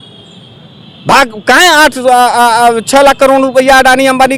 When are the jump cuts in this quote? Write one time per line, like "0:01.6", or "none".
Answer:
none